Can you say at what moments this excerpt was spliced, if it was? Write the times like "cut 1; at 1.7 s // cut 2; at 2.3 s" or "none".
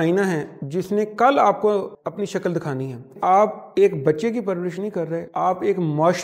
cut 1; at 1.9 s // cut 2; at 3.1 s // cut 3; at 5.3 s